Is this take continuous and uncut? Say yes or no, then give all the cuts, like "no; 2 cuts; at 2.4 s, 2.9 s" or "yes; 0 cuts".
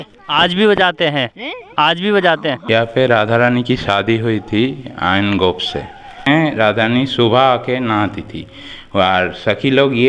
no; 2 cuts; at 2.6 s, 6.2 s